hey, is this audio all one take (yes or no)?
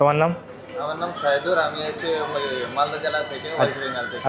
yes